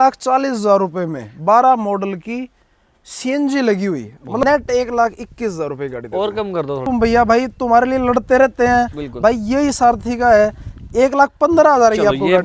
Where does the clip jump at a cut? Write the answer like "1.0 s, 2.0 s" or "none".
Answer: 4.4 s, 6.8 s